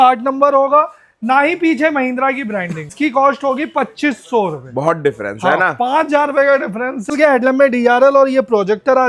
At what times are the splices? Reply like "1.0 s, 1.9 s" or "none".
2.9 s, 7.1 s